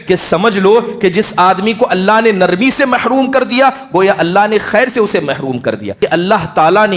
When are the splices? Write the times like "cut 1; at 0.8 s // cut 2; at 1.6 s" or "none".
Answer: cut 1; at 5.9 s

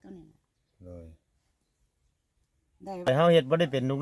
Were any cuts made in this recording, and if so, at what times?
cut 1; at 3.1 s

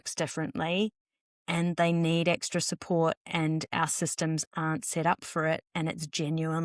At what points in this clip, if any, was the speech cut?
none

